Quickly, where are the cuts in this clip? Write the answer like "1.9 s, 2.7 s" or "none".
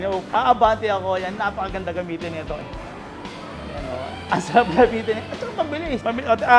none